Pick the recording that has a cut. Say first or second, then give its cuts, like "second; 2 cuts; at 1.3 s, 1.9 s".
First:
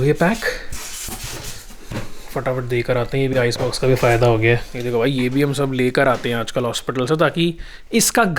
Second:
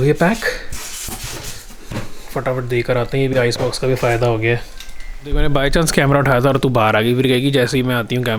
first; 1 cut; at 4.7 s